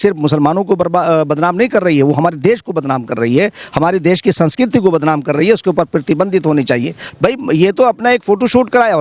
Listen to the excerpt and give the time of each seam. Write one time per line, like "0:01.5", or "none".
0:07.0